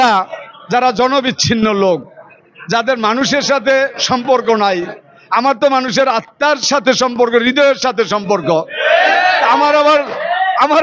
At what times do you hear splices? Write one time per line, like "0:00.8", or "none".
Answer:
none